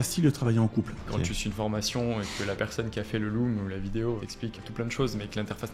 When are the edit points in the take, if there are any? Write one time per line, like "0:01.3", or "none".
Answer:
0:01.2
0:04.6